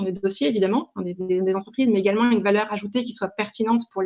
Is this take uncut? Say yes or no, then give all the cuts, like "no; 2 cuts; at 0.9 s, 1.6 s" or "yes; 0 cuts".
yes; 0 cuts